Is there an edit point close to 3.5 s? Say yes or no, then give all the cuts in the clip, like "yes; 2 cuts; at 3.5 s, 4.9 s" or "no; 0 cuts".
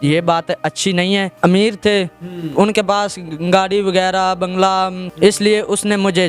no; 2 cuts; at 1.3 s, 5.1 s